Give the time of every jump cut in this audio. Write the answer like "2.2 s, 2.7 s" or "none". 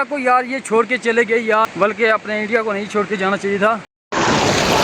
3.7 s